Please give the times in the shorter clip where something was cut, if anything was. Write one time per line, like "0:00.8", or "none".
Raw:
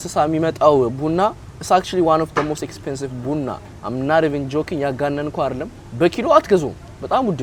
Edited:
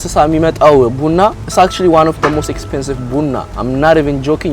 0:01.4
0:03.5